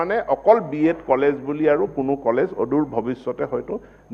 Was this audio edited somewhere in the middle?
no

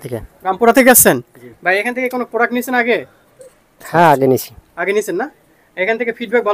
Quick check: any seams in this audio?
no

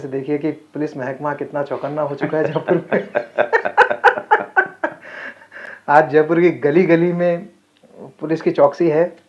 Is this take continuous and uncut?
yes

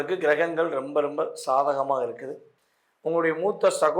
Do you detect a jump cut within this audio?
no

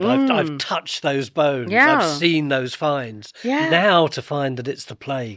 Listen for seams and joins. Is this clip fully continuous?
no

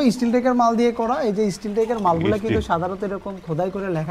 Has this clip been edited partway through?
no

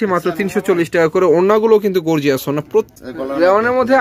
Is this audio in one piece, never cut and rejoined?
no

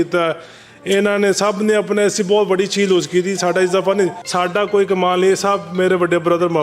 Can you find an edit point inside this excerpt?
yes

